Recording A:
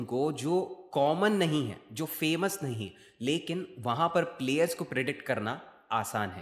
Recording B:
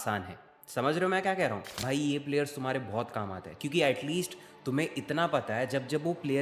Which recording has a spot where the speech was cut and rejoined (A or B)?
B